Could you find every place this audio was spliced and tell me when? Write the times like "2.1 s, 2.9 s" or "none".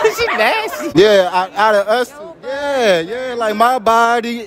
0.9 s